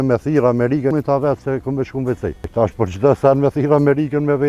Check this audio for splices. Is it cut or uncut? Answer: cut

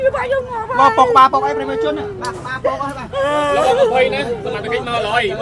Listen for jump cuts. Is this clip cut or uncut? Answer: uncut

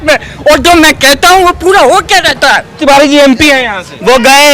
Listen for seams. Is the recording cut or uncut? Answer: cut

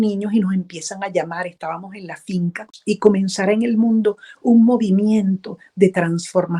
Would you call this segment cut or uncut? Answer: cut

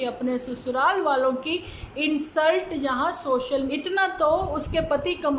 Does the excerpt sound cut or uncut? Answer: cut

